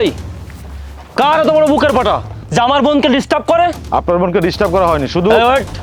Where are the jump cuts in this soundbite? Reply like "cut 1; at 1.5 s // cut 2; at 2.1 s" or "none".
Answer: none

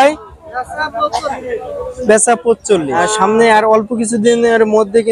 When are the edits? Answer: cut 1; at 3.1 s

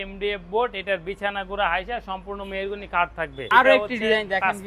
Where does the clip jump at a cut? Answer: cut 1; at 3.4 s

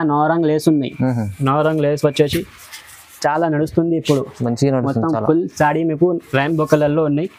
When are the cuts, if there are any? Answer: none

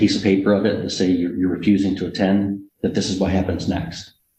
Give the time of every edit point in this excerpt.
none

